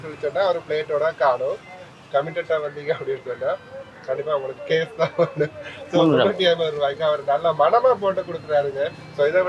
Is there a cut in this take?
no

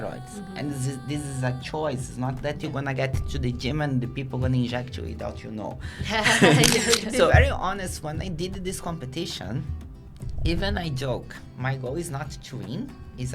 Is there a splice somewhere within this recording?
yes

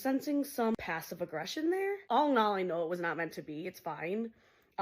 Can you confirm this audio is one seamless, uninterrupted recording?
yes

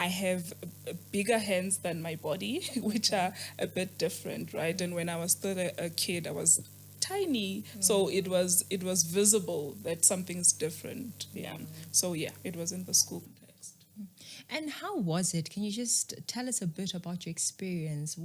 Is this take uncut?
yes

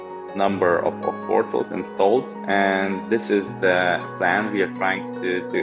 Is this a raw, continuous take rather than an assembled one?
no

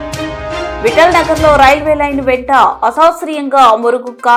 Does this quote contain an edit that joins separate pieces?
no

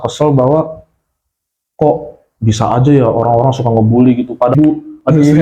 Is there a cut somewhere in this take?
yes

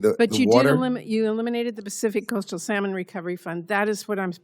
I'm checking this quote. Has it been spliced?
no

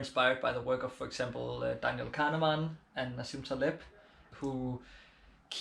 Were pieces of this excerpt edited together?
yes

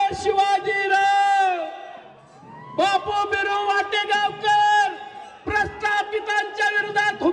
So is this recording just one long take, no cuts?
yes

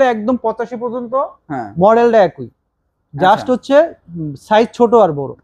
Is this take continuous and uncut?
yes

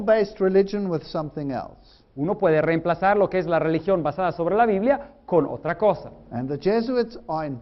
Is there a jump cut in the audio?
yes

